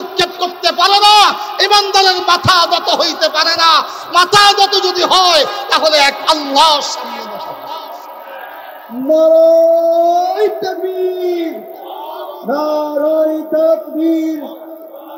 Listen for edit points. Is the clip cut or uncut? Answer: uncut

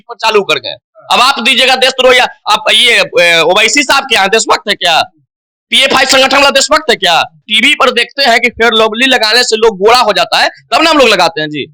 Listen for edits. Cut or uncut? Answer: cut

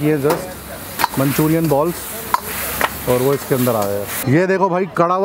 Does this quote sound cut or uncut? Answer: cut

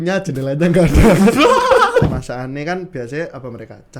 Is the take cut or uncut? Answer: cut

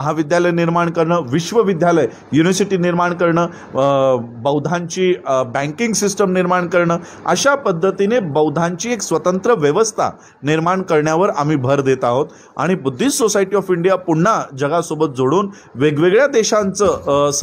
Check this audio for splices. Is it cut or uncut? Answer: uncut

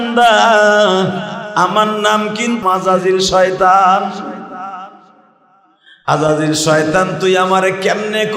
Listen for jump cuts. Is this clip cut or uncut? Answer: cut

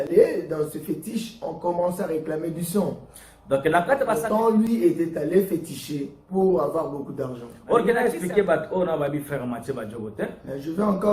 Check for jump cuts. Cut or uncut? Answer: cut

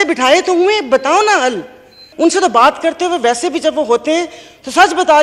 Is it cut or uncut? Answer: cut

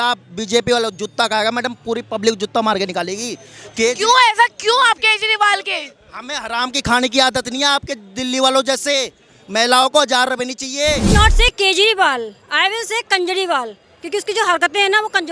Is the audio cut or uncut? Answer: cut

